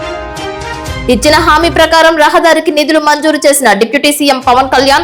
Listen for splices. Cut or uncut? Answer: uncut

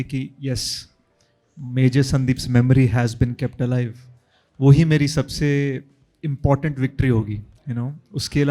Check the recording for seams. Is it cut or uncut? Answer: uncut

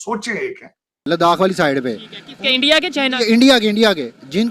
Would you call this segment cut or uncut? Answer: cut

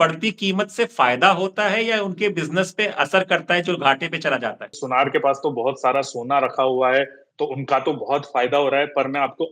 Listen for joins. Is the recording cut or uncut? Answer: cut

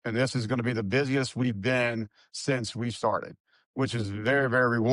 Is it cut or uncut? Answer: uncut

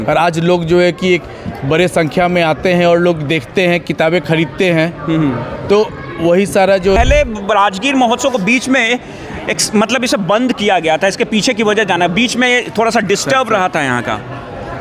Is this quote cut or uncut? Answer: cut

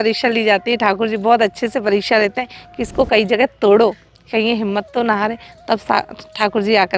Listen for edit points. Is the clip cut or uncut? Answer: uncut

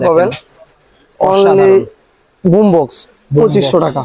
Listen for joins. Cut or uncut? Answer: uncut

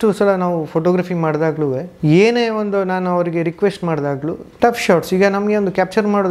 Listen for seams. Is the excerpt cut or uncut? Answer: cut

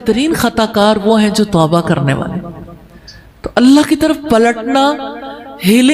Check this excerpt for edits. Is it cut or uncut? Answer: uncut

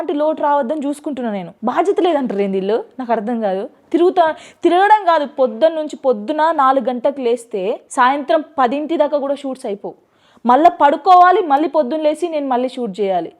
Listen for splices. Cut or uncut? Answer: cut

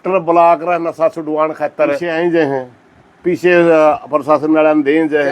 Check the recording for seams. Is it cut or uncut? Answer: cut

